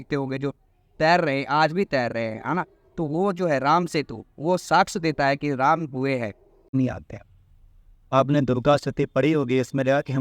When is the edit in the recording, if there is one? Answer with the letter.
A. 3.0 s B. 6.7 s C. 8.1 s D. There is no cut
B